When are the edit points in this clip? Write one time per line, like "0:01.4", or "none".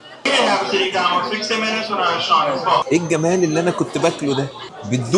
0:02.9